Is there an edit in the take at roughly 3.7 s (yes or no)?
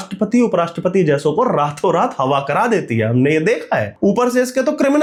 no